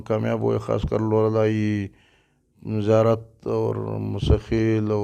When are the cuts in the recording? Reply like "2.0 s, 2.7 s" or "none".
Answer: none